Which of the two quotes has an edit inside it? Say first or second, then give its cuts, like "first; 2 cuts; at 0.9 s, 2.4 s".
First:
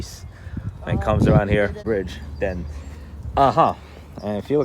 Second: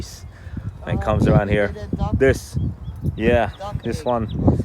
first; 1 cut; at 1.8 s